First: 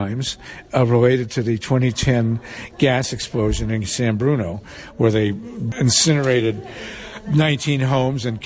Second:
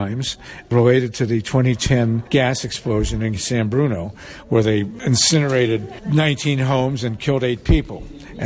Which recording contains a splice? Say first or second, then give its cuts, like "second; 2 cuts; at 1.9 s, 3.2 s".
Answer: second; 4 cuts; at 0.7 s, 2.2 s, 5.0 s, 5.9 s